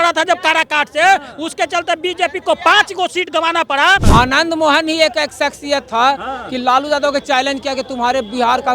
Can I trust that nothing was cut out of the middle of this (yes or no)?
no